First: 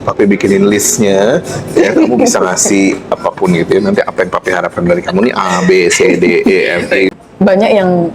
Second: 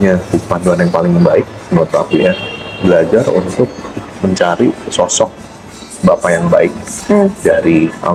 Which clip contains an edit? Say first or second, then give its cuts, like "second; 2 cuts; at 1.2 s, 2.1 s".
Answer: first; 1 cut; at 7.1 s